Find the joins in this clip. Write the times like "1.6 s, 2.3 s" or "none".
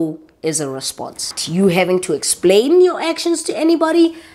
1.4 s